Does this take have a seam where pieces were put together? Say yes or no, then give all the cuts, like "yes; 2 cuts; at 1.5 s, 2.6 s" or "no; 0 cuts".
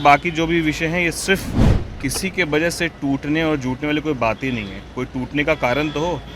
yes; 1 cut; at 1.6 s